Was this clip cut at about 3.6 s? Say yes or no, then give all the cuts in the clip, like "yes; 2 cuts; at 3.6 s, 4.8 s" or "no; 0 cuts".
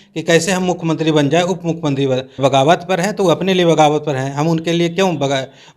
no; 1 cut; at 2.3 s